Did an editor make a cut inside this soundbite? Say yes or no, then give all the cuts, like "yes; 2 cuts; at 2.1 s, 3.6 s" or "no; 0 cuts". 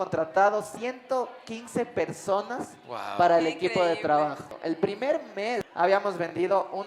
yes; 2 cuts; at 4.5 s, 5.7 s